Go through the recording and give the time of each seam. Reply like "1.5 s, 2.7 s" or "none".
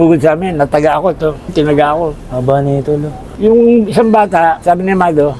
none